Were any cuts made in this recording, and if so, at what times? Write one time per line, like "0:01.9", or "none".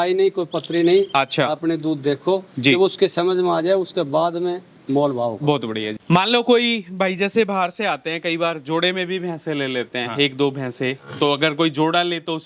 0:05.9